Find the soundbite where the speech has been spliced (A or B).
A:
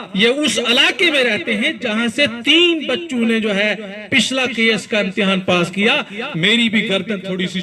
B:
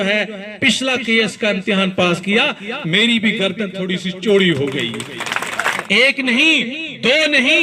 B